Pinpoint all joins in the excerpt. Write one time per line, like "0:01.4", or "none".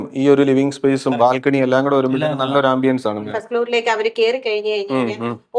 0:03.2